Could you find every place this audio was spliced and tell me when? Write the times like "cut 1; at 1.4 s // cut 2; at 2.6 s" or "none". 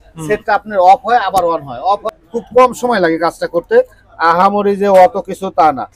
cut 1; at 2.1 s

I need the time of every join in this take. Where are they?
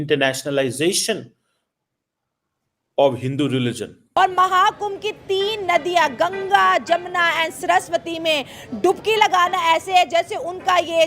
cut 1; at 4.0 s

